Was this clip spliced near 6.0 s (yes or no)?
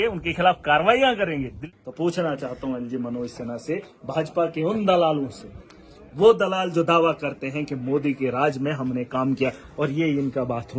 no